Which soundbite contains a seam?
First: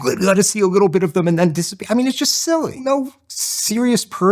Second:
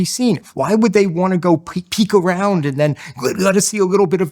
first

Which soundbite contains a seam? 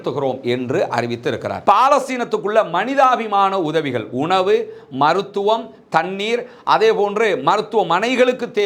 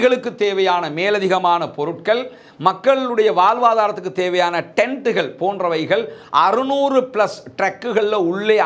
first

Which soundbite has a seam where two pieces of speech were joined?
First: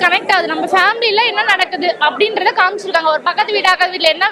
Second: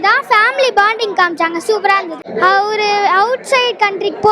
second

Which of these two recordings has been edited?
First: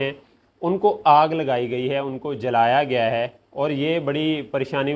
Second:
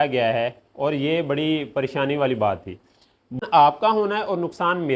second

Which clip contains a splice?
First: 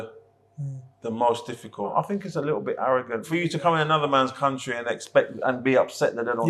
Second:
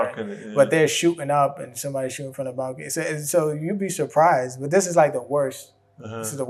first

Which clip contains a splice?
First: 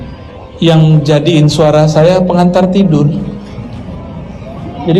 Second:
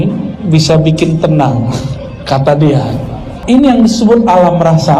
second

